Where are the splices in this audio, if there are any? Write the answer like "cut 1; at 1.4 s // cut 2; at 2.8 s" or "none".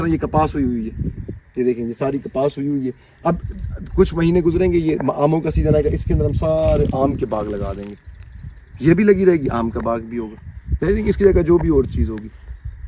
none